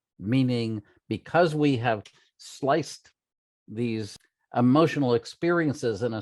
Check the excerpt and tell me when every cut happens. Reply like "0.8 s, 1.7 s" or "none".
4.2 s